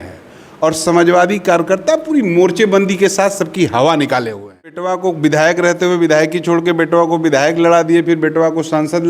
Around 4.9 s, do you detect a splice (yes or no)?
yes